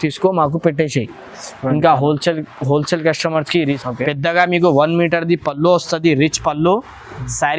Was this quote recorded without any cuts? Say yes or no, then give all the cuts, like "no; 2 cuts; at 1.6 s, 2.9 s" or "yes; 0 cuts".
no; 1 cut; at 3.8 s